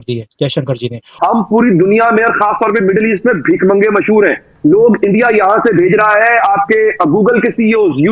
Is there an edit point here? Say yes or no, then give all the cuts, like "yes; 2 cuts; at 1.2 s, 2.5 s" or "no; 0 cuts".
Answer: yes; 1 cut; at 1.0 s